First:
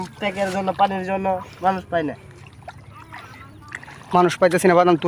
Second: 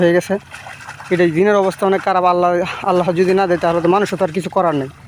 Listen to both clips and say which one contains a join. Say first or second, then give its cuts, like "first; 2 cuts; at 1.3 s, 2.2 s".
first; 1 cut; at 3.8 s